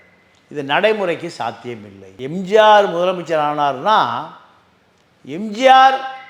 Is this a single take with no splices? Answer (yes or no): yes